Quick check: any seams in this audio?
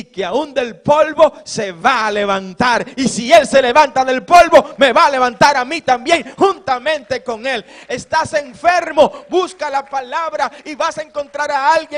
no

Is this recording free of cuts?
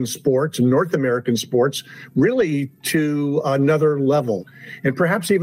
no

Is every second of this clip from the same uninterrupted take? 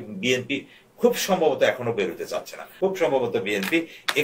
no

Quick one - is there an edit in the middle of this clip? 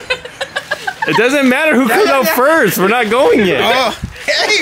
no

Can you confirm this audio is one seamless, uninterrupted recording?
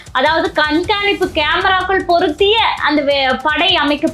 yes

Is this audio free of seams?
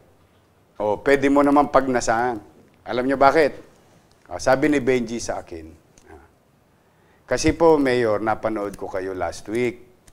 yes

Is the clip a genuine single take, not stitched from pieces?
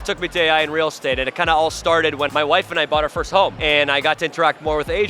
no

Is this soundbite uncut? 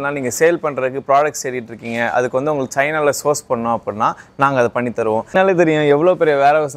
no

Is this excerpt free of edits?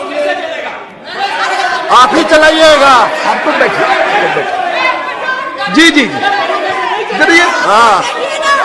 yes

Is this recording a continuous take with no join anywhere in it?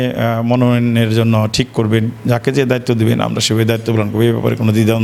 yes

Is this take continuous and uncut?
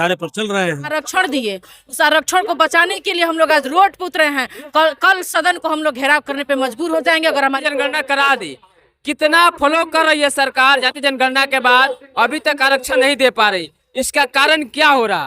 no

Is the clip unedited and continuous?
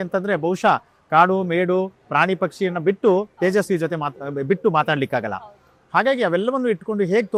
yes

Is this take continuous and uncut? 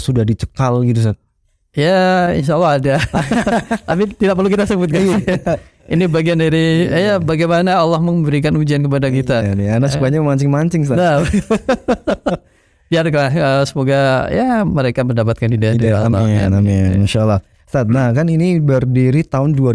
yes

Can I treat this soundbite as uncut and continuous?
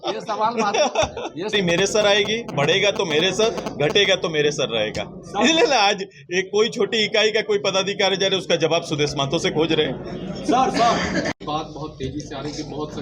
no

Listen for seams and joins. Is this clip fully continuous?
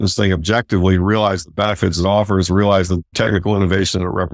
no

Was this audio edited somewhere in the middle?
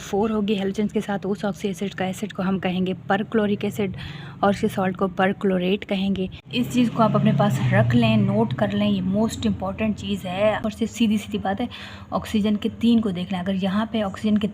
yes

